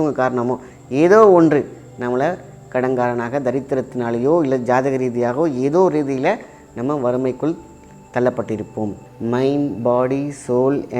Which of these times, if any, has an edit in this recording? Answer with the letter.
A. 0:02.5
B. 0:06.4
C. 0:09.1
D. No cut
C